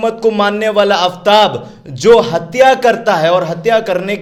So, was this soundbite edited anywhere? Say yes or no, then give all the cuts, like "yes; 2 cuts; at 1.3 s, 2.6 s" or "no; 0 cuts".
no; 0 cuts